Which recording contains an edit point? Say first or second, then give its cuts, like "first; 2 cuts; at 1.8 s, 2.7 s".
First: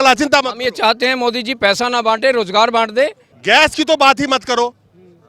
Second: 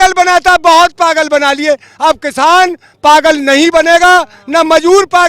first; 1 cut; at 3.3 s